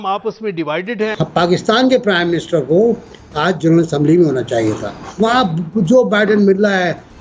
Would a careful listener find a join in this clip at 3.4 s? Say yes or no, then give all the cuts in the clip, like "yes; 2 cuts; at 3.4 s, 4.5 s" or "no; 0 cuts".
no; 2 cuts; at 1.2 s, 5.0 s